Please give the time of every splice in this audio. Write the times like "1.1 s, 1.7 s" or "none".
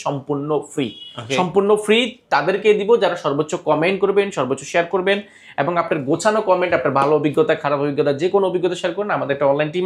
none